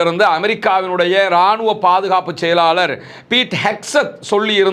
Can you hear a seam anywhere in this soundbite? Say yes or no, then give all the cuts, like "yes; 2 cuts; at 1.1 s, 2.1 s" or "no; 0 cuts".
no; 0 cuts